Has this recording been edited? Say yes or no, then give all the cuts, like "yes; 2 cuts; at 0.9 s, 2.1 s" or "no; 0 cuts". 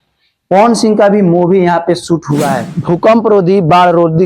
yes; 1 cut; at 2.7 s